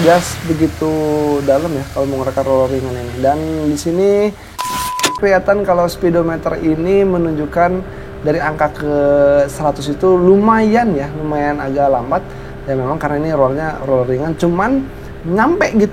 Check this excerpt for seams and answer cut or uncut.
cut